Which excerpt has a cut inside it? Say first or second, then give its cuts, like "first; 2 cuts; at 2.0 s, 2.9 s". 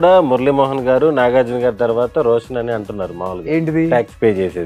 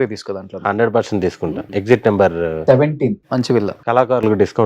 second; 2 cuts; at 1.6 s, 3.8 s